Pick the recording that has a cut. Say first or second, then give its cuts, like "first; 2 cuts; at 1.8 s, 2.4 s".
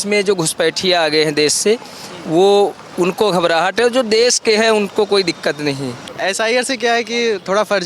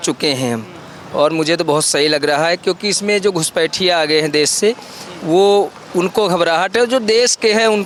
first; 1 cut; at 6.0 s